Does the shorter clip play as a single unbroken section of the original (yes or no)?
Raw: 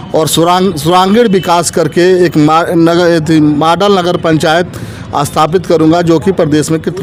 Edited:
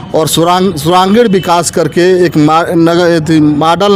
yes